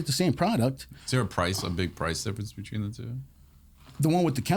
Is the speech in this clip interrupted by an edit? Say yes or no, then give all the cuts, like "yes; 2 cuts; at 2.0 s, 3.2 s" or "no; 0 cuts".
yes; 1 cut; at 0.9 s